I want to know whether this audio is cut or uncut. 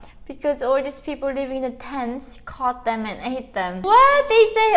cut